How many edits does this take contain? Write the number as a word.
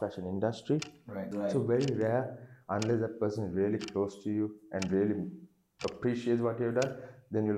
one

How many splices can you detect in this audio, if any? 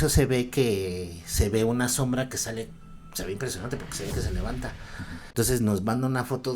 one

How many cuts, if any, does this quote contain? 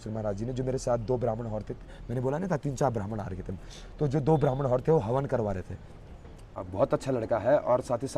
one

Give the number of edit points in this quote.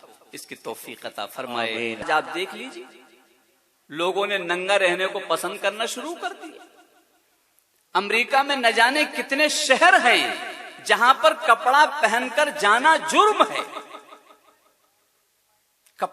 one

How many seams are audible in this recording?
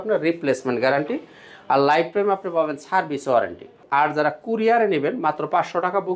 one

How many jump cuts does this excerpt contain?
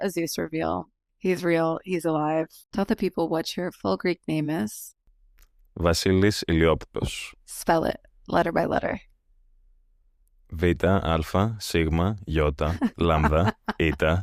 zero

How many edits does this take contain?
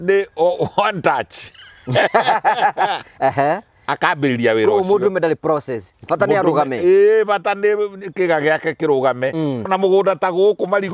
one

